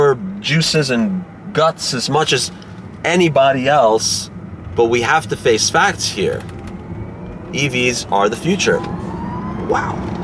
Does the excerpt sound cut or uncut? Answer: uncut